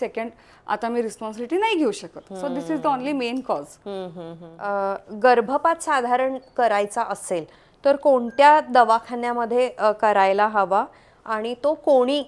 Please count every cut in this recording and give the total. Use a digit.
0